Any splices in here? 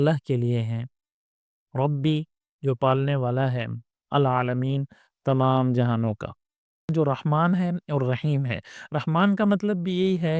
yes; 1 cut; at 6.9 s

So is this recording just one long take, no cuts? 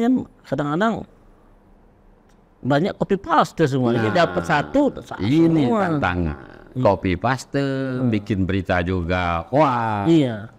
yes; 0 cuts

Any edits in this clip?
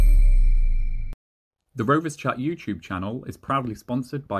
yes; 1 cut; at 1.7 s

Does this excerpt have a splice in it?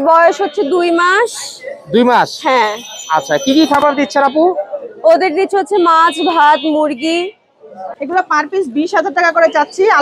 yes; 1 cut; at 7.9 s

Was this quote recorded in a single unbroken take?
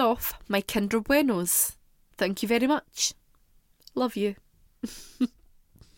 yes; 0 cuts

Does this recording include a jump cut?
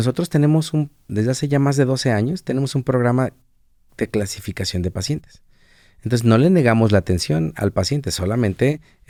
no; 0 cuts

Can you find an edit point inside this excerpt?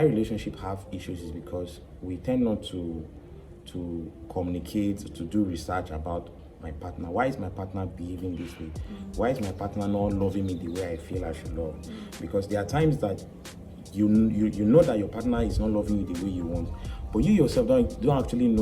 no; 0 cuts

